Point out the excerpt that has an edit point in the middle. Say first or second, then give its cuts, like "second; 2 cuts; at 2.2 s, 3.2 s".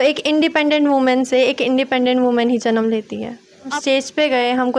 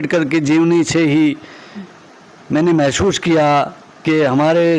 first; 1 cut; at 3.7 s